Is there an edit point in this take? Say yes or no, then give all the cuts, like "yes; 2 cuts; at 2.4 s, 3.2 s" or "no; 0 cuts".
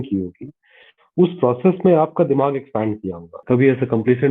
yes; 1 cut; at 3.4 s